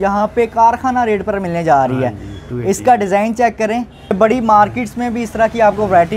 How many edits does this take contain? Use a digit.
1